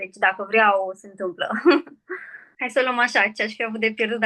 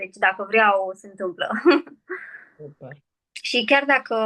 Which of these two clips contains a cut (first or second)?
first